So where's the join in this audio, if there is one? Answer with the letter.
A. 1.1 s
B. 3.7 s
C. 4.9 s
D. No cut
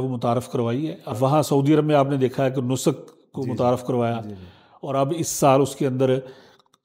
A